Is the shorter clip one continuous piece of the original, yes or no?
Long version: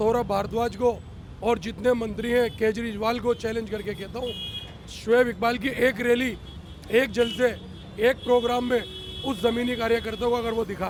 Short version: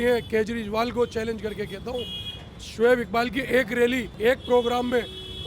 no